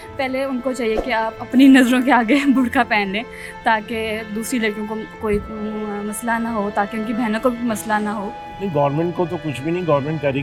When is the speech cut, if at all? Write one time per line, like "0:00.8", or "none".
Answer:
none